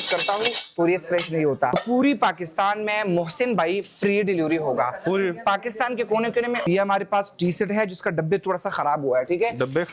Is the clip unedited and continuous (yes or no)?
no